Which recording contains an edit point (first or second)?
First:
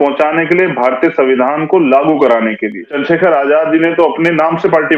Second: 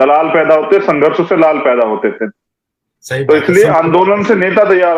first